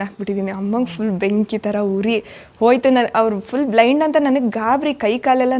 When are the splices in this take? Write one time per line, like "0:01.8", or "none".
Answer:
none